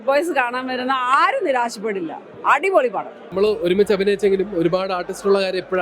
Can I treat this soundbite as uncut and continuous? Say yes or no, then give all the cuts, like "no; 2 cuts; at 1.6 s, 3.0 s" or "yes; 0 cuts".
no; 1 cut; at 3.3 s